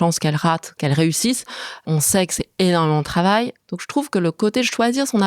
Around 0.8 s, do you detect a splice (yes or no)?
yes